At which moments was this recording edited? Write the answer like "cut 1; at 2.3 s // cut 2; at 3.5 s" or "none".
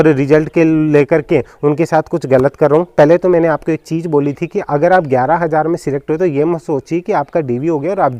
none